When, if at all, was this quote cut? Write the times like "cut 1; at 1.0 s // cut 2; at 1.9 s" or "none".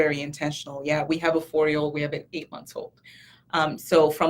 none